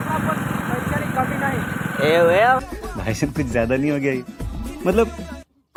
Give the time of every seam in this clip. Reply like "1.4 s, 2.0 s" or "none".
none